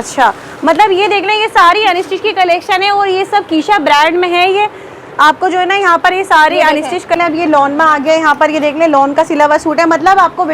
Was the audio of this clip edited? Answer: yes; 1 cut; at 7.2 s

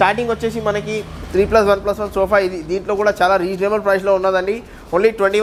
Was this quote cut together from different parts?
no; 0 cuts

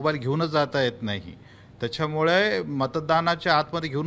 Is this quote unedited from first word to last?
yes; 0 cuts

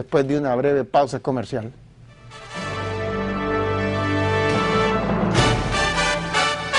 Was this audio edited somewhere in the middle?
no; 0 cuts

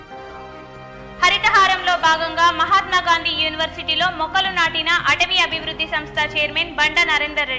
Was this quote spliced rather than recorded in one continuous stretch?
no; 0 cuts

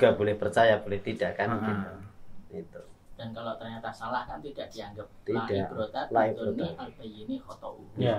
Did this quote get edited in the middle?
no; 0 cuts

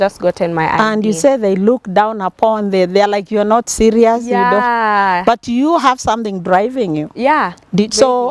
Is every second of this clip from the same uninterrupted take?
yes; 0 cuts

